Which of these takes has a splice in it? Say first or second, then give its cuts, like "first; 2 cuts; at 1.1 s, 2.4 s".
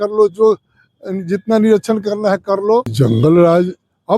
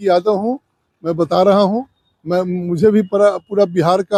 first; 1 cut; at 2.9 s